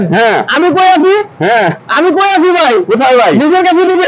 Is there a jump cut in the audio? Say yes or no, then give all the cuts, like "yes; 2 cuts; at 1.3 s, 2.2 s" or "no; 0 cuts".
no; 0 cuts